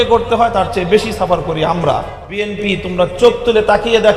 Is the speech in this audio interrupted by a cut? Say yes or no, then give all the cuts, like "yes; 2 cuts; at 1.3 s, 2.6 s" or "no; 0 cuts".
yes; 1 cut; at 2.5 s